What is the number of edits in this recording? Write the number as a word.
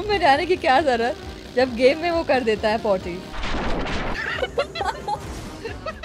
zero